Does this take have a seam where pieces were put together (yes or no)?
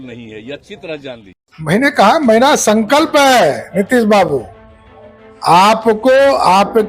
yes